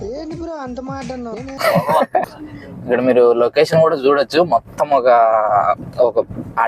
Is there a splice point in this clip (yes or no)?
yes